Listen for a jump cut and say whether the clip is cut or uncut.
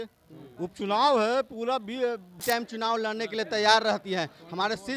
cut